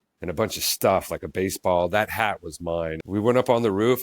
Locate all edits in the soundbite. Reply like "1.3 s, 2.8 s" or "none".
3.0 s